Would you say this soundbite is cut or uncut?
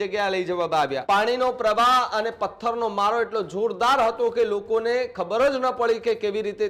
cut